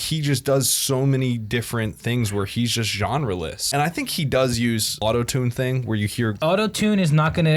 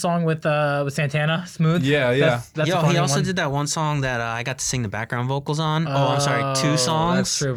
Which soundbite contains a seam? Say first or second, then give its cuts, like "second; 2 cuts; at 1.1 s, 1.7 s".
first; 3 cuts; at 3.6 s, 5.0 s, 6.4 s